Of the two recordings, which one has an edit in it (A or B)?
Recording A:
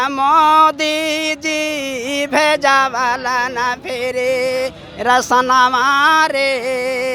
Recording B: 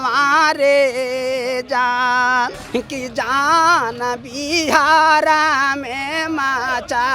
B